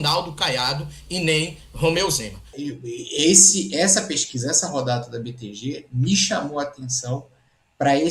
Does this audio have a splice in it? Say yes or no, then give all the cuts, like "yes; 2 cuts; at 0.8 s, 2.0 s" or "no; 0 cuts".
yes; 1 cut; at 2.5 s